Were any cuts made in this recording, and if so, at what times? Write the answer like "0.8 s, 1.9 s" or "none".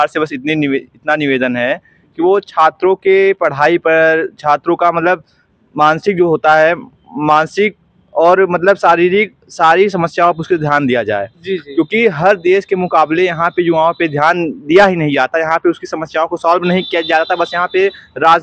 none